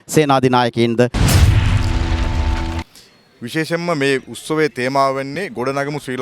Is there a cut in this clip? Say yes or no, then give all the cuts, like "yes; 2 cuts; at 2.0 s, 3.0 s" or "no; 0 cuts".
yes; 2 cuts; at 1.2 s, 2.8 s